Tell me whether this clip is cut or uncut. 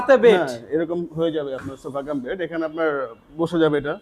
uncut